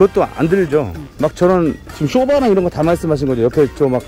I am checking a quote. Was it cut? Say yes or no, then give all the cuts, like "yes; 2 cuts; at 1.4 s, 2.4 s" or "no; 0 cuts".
no; 0 cuts